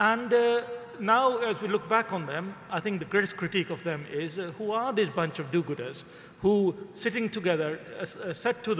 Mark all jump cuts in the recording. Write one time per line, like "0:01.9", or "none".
0:06.9